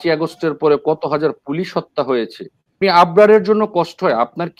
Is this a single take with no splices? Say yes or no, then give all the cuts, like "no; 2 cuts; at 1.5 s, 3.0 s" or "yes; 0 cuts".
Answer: no; 1 cut; at 2.8 s